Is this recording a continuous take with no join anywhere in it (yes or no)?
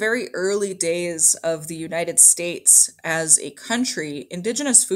yes